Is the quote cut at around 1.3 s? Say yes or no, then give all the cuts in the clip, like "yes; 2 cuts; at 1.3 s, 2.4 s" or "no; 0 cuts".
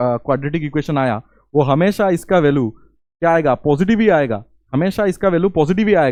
no; 0 cuts